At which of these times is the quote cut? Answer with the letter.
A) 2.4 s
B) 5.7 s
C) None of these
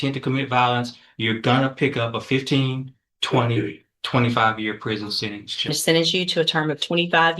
B